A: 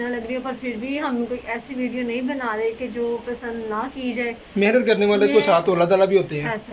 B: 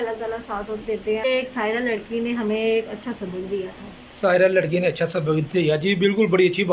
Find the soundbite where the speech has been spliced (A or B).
B